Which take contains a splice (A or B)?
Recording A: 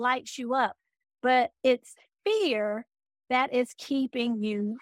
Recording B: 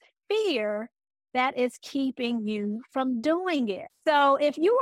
B